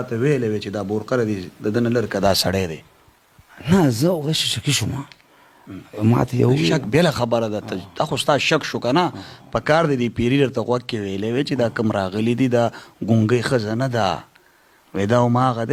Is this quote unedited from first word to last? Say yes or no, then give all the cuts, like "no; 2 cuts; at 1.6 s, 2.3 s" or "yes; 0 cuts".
yes; 0 cuts